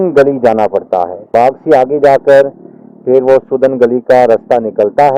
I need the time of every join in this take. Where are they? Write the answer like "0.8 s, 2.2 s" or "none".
none